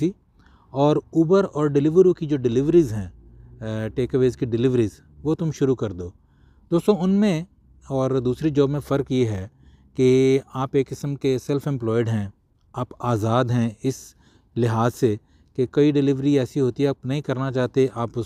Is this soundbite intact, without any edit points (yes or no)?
yes